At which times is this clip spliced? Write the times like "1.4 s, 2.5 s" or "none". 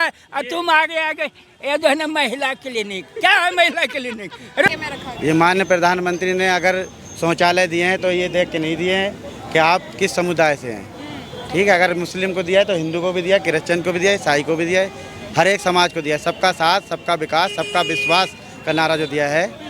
4.7 s